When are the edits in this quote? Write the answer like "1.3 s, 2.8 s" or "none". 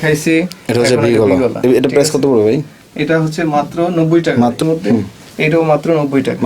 4.6 s